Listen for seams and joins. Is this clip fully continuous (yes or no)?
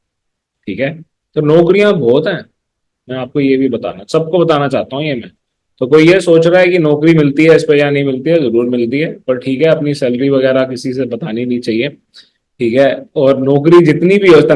yes